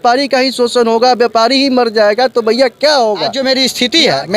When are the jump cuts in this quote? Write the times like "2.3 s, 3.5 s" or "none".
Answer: 3.4 s